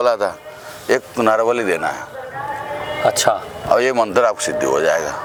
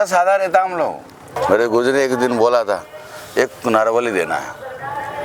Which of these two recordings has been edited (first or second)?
second